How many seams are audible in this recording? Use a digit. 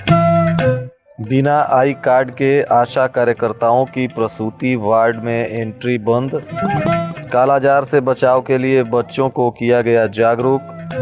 1